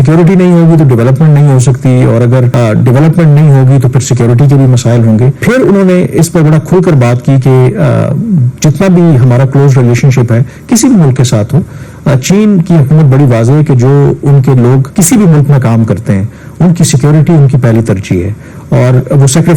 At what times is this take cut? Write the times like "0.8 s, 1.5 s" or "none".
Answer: 2.5 s, 5.4 s, 14.9 s